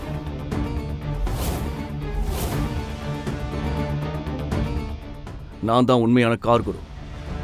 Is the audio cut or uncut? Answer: uncut